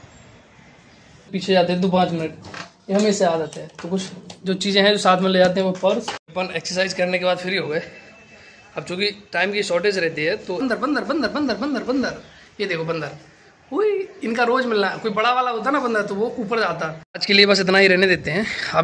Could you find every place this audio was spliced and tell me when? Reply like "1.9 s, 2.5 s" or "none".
1.4 s, 6.2 s, 10.6 s, 17.1 s